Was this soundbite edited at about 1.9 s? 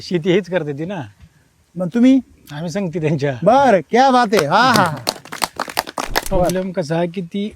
no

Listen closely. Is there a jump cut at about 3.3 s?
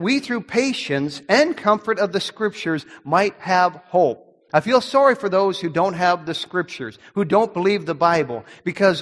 no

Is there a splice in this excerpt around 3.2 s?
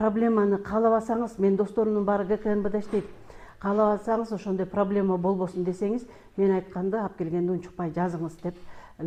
no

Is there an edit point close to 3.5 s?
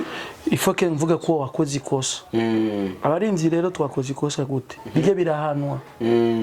no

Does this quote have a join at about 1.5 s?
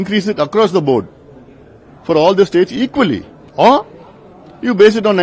no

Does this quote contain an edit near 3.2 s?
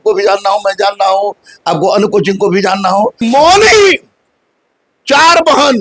yes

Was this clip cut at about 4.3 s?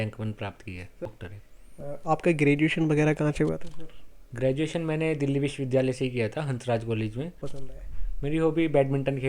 no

